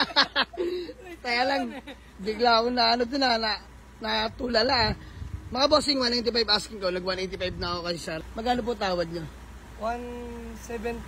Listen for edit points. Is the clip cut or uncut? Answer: cut